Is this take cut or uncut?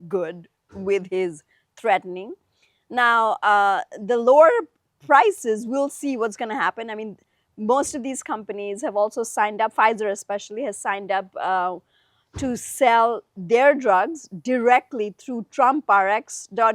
uncut